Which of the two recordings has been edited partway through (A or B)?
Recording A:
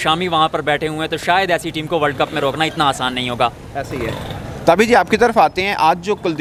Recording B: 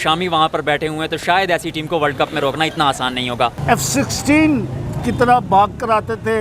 B